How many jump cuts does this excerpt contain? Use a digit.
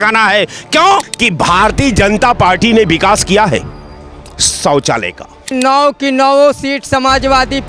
2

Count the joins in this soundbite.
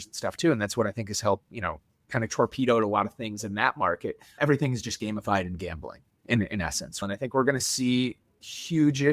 2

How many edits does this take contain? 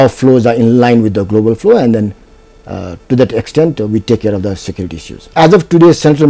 1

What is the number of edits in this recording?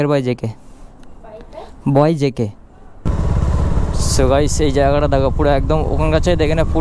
1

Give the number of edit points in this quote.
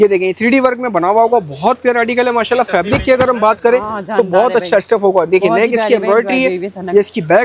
0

